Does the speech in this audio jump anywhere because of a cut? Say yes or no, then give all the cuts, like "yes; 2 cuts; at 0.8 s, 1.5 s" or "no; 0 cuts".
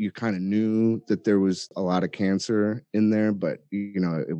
yes; 1 cut; at 1.7 s